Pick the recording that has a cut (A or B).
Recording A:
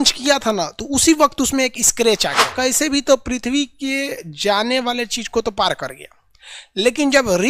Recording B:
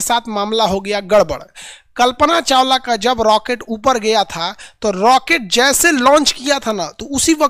A